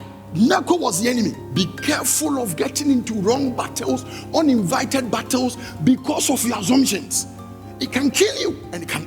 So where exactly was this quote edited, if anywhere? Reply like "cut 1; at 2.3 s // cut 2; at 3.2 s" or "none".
cut 1; at 1.4 s